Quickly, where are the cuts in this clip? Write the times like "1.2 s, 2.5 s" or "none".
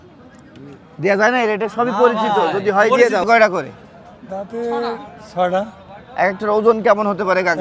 3.2 s